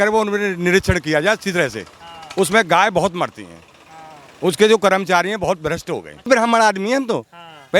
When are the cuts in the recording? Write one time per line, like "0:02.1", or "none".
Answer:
0:06.3